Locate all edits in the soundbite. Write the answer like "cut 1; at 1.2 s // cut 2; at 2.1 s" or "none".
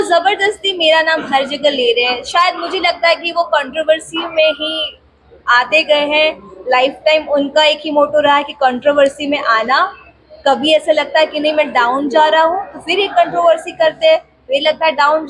none